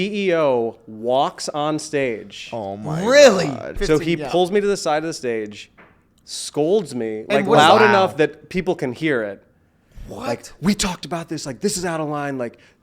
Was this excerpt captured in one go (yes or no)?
no